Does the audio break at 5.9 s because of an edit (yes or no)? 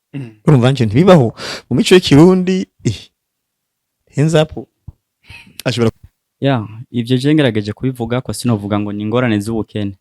yes